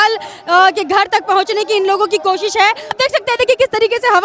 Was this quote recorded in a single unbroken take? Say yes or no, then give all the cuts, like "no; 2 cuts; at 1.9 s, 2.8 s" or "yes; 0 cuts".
no; 1 cut; at 2.9 s